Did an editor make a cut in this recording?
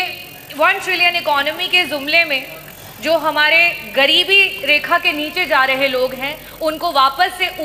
no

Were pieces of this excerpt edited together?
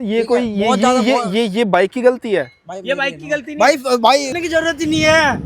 yes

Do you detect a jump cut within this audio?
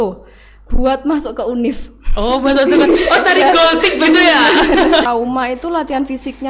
yes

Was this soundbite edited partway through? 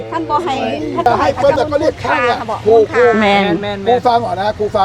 yes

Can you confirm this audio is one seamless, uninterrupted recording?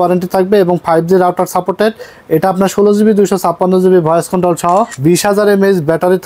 no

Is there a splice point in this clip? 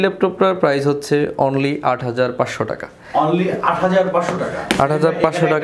no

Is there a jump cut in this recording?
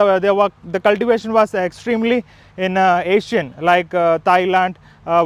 no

